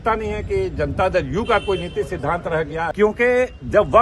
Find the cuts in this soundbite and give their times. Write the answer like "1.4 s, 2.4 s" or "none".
2.9 s